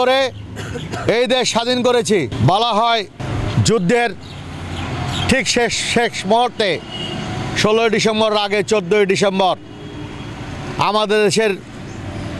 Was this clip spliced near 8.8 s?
no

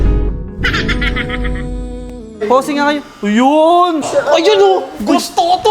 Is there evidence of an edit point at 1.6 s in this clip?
no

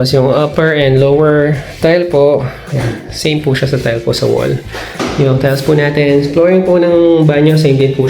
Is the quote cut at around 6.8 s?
no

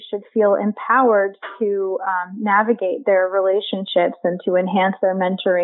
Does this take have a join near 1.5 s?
no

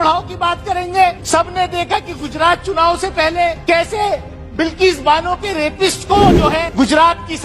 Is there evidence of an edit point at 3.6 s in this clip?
yes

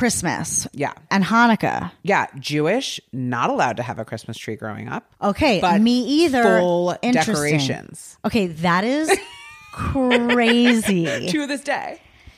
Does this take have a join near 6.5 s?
no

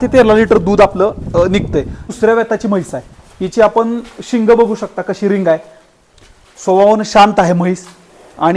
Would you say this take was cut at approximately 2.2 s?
yes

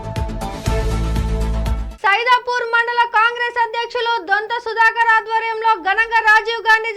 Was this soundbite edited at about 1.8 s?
yes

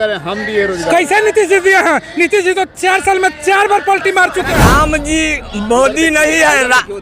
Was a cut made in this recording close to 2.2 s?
no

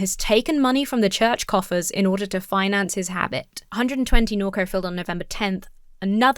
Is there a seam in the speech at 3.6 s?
yes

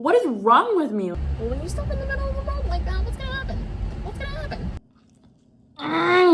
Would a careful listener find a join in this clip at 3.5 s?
no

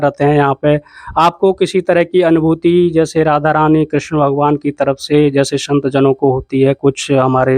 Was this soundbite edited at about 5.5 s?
no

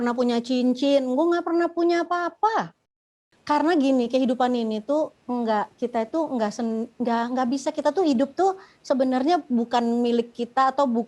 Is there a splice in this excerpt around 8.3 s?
no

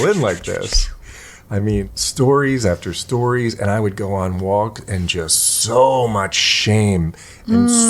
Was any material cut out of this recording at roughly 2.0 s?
yes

